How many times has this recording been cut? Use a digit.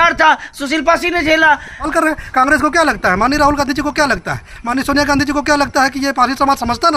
1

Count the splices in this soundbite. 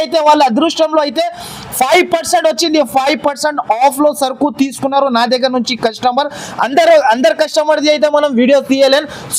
0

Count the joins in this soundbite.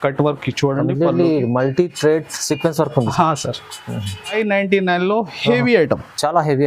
1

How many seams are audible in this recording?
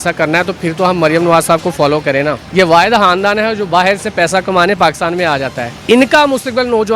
2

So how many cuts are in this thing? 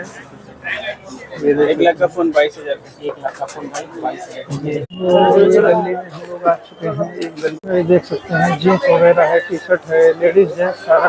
2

